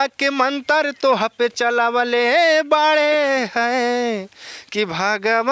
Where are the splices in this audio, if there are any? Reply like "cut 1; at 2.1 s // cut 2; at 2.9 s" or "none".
none